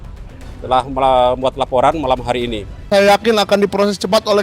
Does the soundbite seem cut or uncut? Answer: cut